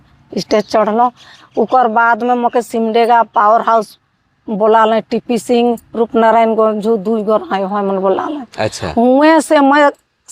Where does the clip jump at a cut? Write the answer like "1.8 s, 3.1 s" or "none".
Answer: none